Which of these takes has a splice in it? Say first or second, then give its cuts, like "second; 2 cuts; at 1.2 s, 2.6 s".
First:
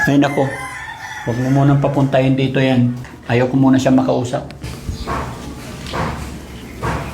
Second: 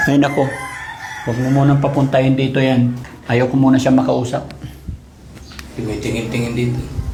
first; 1 cut; at 4.7 s